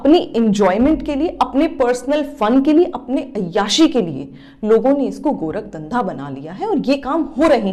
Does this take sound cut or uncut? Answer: uncut